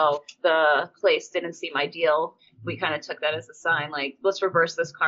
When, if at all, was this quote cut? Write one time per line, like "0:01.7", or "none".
0:00.9
0:02.5